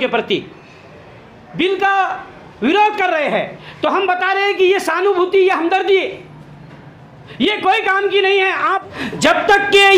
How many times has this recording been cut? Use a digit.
1